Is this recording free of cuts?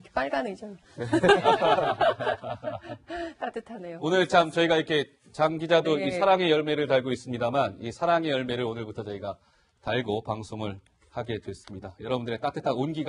no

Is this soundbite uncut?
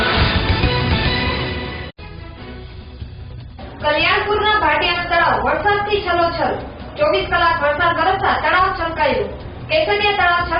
no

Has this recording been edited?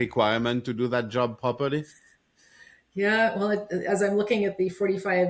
no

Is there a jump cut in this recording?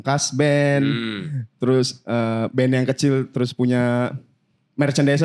no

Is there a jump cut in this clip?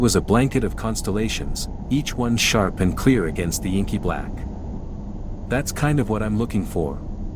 yes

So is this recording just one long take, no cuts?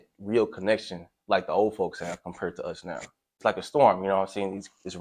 no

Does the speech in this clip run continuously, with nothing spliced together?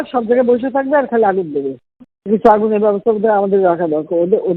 yes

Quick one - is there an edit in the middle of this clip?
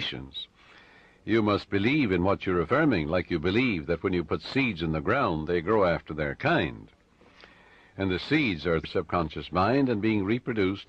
no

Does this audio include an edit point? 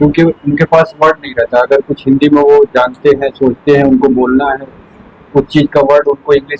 no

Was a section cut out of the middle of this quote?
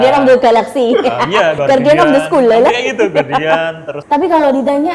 yes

